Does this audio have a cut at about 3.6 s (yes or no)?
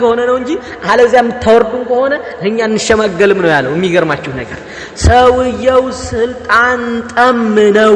no